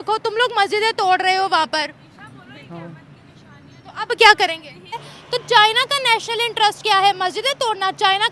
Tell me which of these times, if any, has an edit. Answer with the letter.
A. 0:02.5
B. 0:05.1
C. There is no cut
B